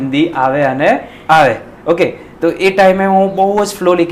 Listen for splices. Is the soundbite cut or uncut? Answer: uncut